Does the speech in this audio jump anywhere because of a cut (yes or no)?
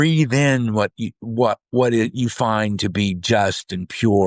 no